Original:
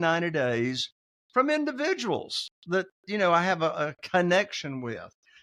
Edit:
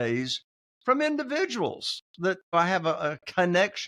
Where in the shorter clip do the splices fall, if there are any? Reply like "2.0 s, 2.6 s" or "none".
2.5 s